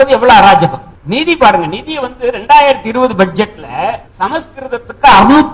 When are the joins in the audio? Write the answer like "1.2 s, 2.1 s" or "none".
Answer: 0.9 s, 4.1 s